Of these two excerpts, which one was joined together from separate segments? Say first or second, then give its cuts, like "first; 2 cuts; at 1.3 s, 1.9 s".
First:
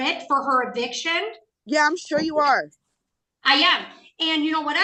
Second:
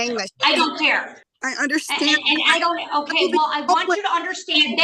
second; 1 cut; at 1.1 s